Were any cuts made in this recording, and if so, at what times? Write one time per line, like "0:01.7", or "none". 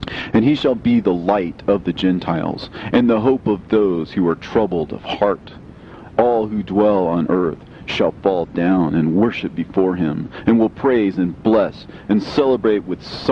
none